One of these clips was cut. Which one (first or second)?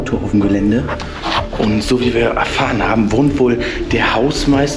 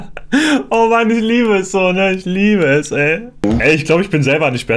second